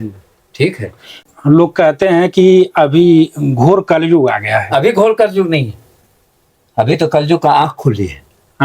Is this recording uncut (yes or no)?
no